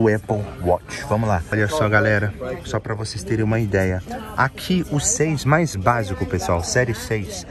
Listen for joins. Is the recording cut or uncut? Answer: cut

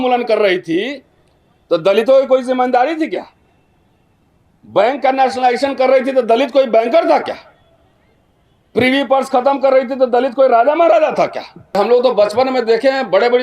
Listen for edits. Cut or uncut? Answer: cut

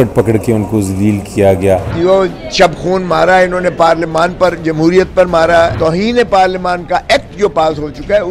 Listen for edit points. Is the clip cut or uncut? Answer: cut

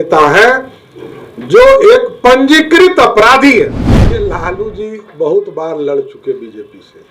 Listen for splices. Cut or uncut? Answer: cut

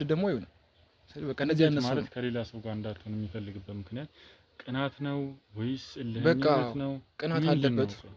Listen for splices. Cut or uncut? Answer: uncut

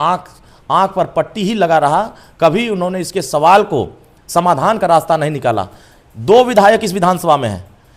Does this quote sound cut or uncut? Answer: uncut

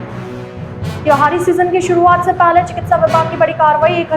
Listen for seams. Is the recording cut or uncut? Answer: cut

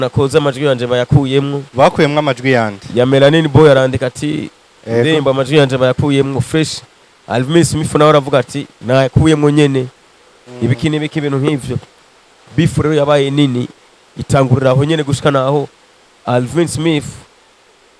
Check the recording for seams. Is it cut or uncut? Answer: uncut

